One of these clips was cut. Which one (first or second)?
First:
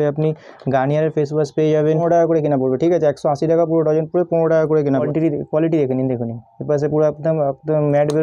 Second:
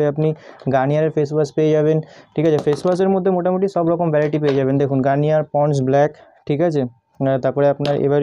first